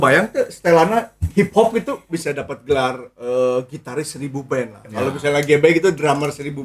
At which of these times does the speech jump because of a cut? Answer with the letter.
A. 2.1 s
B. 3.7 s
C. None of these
A